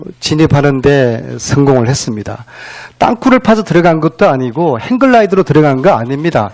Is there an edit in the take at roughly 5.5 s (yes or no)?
no